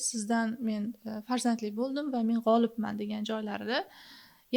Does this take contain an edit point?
no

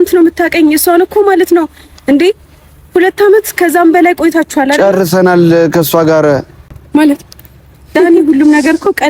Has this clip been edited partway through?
no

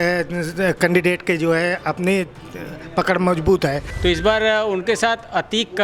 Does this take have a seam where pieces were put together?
yes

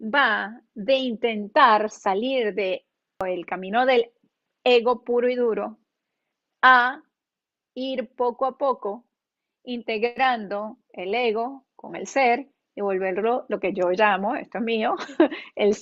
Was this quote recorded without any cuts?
no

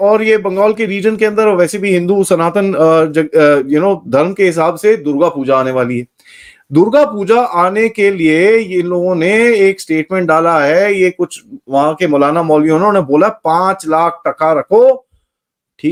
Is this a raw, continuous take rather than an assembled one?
yes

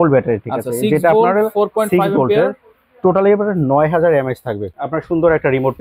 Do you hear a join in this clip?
yes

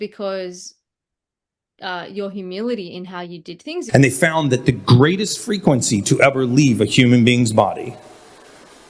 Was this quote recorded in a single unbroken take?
no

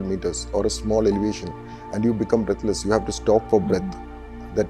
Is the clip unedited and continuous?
yes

